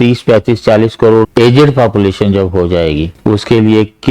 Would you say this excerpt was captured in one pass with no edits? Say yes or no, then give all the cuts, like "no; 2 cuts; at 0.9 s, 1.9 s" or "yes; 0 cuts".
no; 2 cuts; at 1.3 s, 3.1 s